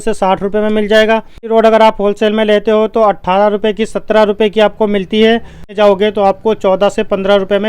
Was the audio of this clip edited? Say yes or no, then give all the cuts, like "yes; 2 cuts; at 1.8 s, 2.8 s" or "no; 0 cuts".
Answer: yes; 2 cuts; at 1.4 s, 5.7 s